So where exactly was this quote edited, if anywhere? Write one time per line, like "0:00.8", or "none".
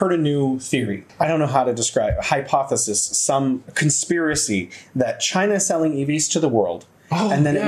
0:01.0